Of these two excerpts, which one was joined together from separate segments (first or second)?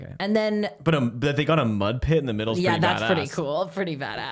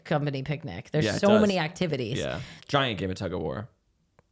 second